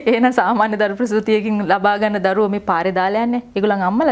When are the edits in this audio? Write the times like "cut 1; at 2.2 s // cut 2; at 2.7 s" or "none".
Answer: none